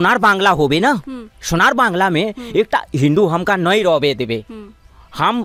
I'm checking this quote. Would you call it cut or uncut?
uncut